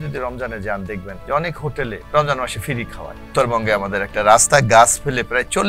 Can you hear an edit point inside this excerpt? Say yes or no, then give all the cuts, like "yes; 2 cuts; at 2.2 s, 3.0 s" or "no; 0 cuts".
yes; 3 cuts; at 1.1 s, 2.0 s, 3.3 s